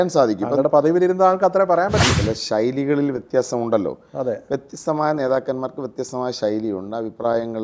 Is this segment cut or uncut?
cut